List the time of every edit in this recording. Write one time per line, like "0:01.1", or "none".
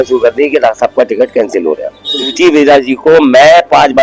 0:02.3